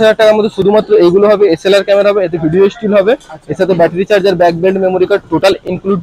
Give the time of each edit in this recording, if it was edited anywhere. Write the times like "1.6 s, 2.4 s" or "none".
none